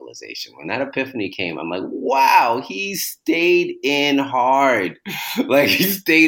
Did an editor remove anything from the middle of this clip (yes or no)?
no